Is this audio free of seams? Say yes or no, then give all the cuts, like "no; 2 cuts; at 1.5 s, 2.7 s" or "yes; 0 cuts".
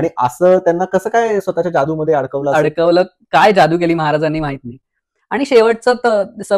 yes; 0 cuts